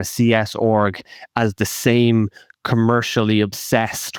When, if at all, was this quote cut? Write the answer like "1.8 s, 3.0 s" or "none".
none